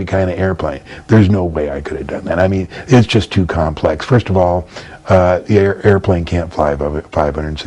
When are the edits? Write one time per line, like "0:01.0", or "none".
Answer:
none